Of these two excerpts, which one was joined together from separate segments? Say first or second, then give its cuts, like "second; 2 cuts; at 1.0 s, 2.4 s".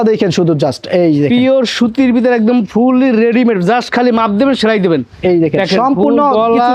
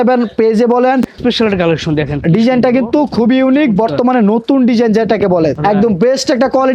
second; 2 cuts; at 1.1 s, 5.6 s